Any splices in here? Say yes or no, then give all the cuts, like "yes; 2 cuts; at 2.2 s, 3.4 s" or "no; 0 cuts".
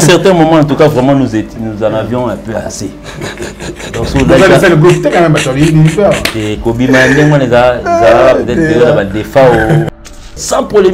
yes; 1 cut; at 9.9 s